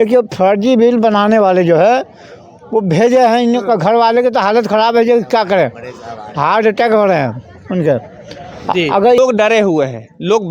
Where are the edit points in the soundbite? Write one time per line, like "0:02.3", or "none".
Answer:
0:09.2